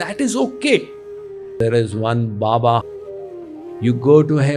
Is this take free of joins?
no; 2 cuts; at 1.5 s, 3.1 s

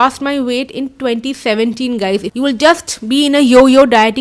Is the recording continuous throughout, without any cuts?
no; 1 cut; at 2.3 s

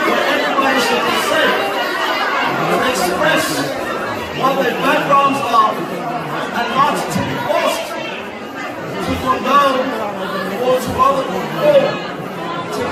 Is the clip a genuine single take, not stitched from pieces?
yes; 0 cuts

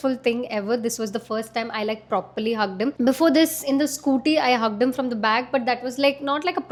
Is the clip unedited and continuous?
yes; 0 cuts

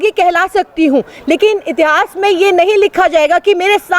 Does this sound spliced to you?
no; 0 cuts

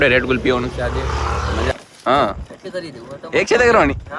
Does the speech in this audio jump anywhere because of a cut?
yes; 1 cut; at 1.7 s

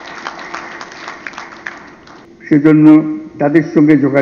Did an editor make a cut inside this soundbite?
yes; 1 cut; at 2.3 s

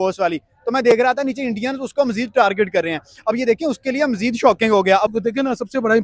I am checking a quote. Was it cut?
yes; 1 cut; at 5.1 s

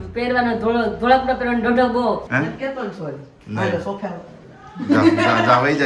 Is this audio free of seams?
no; 1 cut; at 2.3 s

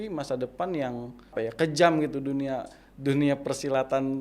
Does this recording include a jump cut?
yes; 1 cut; at 1.3 s

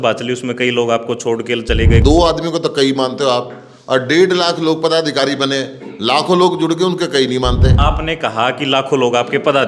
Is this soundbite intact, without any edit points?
no; 2 cuts; at 2.0 s, 7.7 s

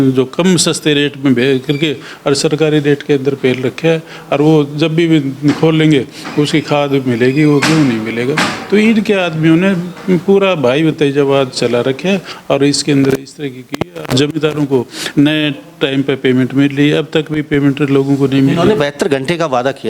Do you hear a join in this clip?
no; 0 cuts

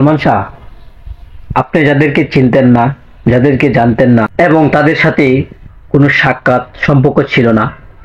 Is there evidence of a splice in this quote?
no; 0 cuts

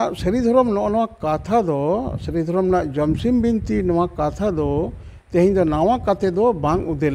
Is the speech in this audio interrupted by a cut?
no; 0 cuts

